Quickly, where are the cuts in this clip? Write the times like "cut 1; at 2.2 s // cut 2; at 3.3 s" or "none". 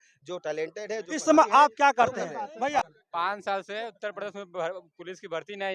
cut 1; at 2.8 s